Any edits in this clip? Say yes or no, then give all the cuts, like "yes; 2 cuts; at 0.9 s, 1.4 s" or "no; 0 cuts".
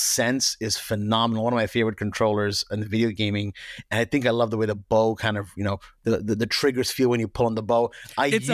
no; 0 cuts